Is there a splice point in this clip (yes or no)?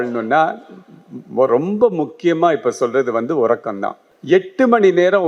yes